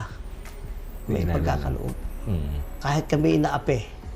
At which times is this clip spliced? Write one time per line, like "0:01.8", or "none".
0:02.8

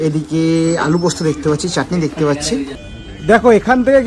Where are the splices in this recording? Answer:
0:02.8

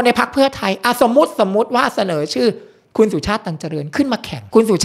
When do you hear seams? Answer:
none

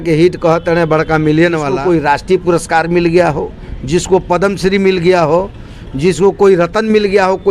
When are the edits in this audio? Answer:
0:01.7

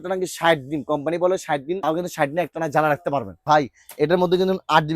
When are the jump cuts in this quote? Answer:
0:01.8
0:03.4

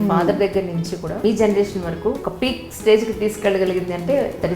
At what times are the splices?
0:01.2
0:02.3

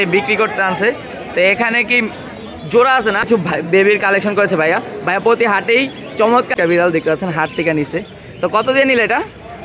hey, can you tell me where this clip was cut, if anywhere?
0:03.5
0:06.5

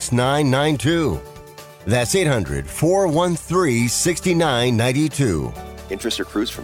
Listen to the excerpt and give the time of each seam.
none

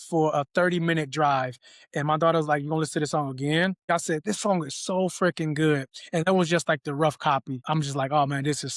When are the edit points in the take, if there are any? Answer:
0:03.9
0:07.5

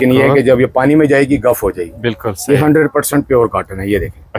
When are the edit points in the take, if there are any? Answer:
none

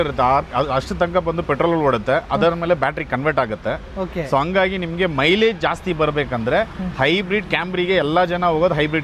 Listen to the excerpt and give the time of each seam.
none

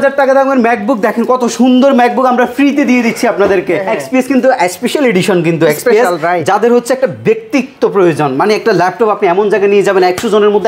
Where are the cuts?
0:03.9

